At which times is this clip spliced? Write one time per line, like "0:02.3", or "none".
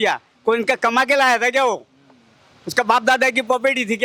none